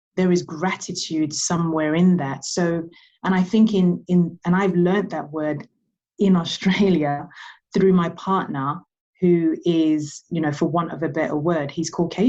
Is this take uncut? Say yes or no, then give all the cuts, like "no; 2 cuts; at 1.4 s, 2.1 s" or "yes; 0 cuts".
yes; 0 cuts